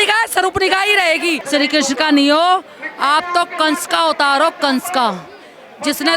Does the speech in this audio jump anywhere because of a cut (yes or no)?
yes